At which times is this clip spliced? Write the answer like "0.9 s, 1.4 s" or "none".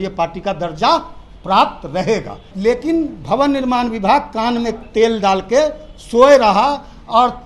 2.5 s